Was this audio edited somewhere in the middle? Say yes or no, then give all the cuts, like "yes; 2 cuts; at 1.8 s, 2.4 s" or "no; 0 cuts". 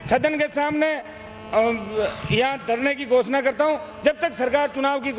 no; 0 cuts